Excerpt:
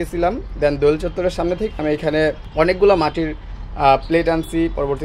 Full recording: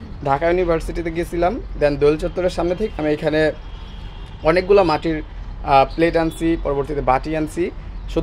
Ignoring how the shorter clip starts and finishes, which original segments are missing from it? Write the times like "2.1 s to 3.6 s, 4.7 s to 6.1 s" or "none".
3.6 s to 4.3 s

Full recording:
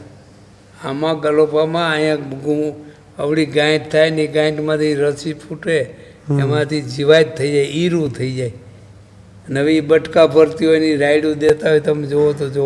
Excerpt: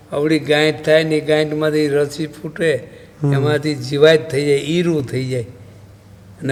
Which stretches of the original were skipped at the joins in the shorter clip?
none

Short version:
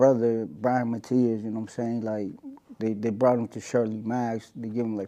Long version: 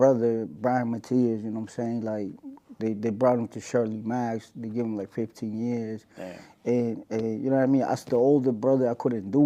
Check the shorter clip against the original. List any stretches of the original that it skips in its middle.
none

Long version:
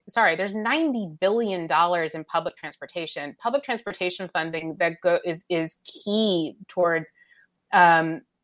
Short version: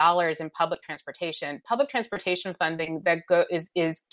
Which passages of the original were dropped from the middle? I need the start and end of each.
none

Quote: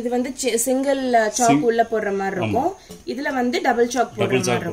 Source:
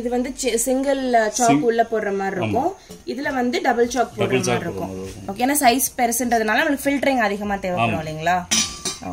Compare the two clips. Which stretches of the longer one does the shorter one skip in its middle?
none

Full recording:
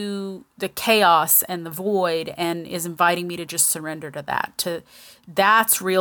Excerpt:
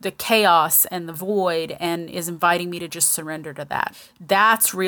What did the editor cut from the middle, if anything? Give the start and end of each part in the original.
4.5 s to 5.0 s

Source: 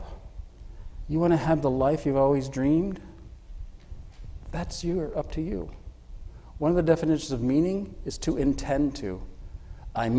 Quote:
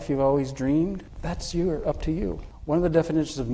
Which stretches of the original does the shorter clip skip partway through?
3.1 s to 4.4 s, 5.8 s to 6.4 s

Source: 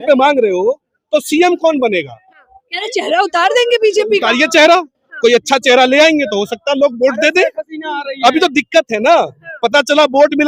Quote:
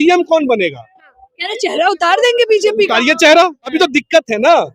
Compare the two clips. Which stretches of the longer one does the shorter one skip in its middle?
5.1 s to 8.3 s

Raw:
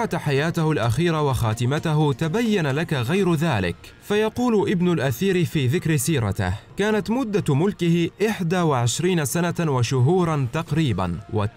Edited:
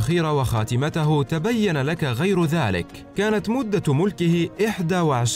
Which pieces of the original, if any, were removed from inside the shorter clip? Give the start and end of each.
3.9 s to 6.6 s

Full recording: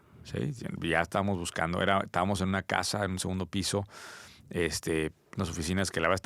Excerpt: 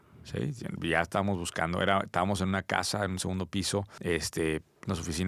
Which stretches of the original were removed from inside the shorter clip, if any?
3.9 s to 4.4 s

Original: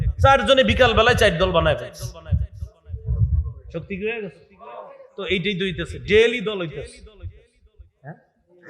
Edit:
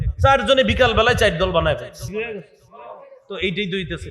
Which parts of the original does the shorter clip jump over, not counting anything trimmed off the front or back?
2.1 s to 4.0 s

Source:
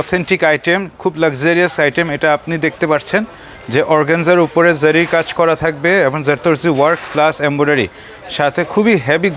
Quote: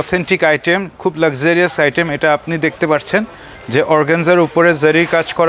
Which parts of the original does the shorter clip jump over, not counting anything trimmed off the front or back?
none

